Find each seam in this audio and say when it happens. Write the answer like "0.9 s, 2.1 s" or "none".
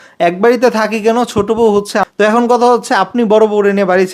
2.0 s